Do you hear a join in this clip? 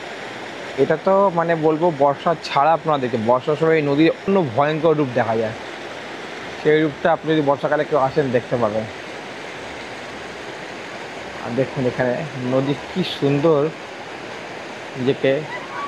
no; 0 cuts

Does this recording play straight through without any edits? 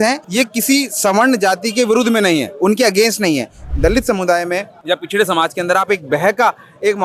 no; 1 cut; at 3.6 s

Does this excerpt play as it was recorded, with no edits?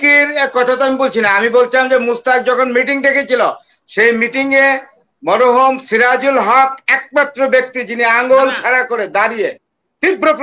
yes; 0 cuts

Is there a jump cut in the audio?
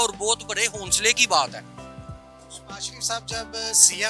no; 0 cuts

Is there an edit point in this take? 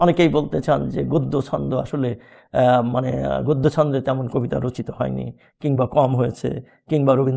no; 0 cuts

